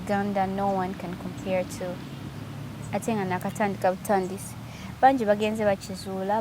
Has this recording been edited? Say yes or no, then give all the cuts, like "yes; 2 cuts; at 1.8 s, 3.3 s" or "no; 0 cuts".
no; 0 cuts